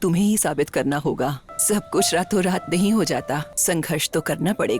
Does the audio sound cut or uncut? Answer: cut